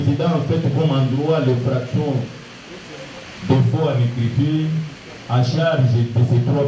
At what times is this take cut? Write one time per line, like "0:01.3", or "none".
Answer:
none